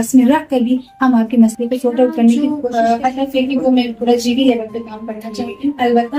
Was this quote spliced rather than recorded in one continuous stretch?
yes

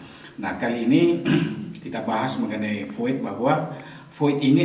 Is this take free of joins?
yes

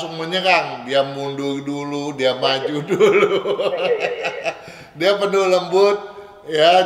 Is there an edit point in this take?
no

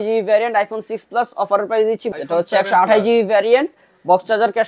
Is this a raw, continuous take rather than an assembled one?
no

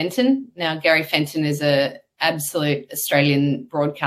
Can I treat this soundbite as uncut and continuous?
yes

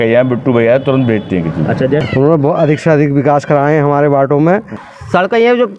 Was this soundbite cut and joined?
yes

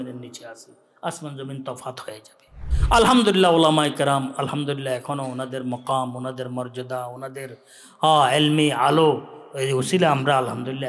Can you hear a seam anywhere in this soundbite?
yes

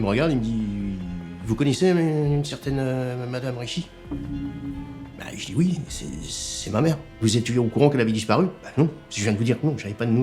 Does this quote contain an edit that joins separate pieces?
yes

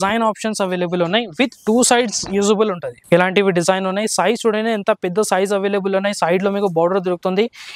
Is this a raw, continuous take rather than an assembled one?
no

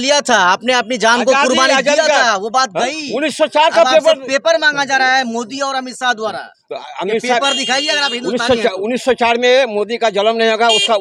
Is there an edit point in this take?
no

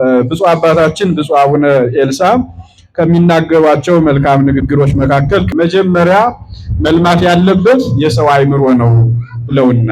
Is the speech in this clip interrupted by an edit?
yes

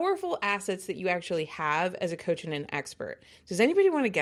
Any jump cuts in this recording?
no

